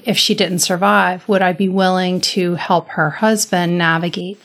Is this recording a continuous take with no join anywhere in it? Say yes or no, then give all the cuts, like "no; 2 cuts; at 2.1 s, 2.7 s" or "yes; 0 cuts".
yes; 0 cuts